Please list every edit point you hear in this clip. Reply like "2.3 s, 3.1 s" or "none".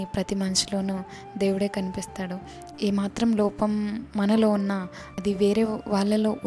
none